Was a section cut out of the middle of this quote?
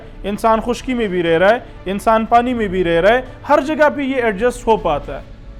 no; 0 cuts

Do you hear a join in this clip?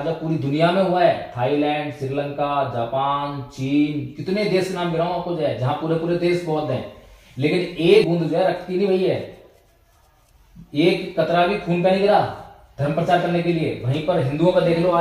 yes; 1 cut; at 8.0 s

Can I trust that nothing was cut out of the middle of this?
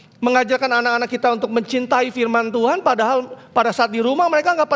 yes; 0 cuts

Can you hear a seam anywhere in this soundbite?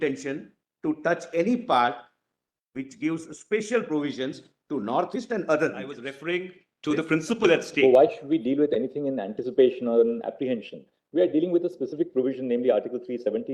yes; 1 cut; at 6.1 s

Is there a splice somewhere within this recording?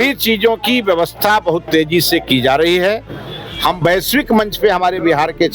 no; 0 cuts

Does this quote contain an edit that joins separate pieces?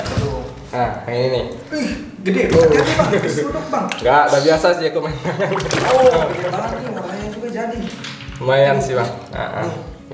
no; 0 cuts

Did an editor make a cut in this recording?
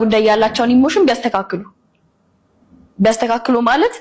no; 0 cuts

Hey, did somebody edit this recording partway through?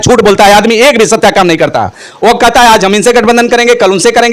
no; 0 cuts

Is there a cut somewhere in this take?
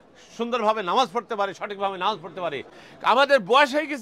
no; 0 cuts

